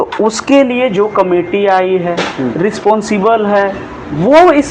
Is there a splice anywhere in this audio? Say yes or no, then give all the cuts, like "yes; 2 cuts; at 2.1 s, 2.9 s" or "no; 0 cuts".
no; 0 cuts